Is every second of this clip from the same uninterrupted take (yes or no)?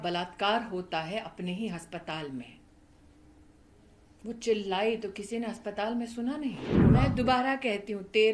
no